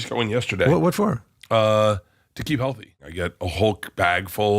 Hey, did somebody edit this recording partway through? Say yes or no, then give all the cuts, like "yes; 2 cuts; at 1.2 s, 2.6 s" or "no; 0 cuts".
yes; 1 cut; at 3.0 s